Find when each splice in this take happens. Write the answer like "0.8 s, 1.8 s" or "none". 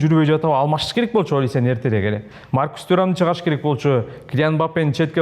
none